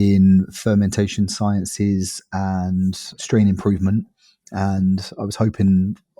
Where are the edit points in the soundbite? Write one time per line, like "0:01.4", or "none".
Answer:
0:03.1

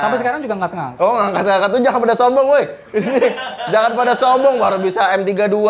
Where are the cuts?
none

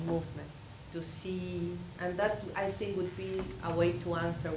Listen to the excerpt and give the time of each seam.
0:02.1

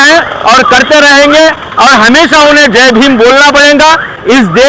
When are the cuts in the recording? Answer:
none

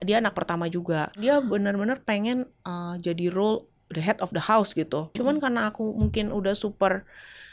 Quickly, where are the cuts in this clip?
0:01.2
0:05.1

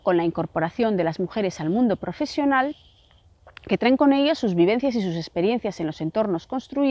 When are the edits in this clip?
none

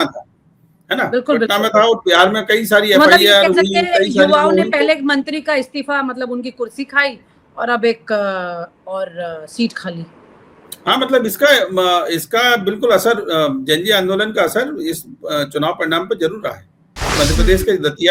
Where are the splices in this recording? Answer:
0:17.1

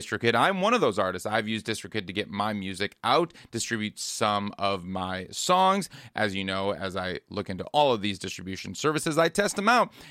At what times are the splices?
none

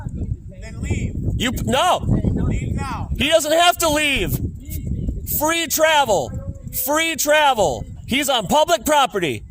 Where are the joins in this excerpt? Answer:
0:07.9

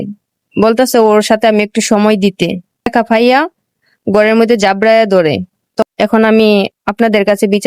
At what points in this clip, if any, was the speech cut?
0:02.9
0:05.7

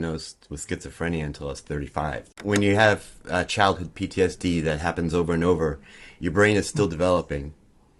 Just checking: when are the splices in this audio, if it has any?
0:02.3

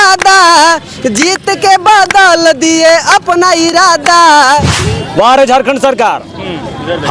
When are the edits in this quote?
0:04.8

